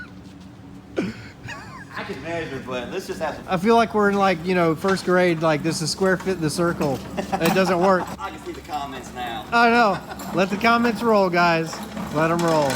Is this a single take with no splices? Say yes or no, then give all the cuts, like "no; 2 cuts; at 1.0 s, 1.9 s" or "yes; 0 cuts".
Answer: no; 2 cuts; at 3.4 s, 8.1 s